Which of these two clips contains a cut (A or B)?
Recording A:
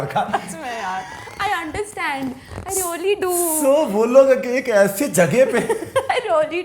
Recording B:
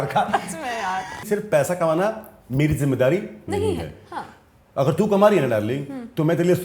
B